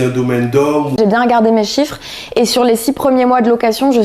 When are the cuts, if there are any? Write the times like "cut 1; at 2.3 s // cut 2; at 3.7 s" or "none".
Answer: cut 1; at 1.0 s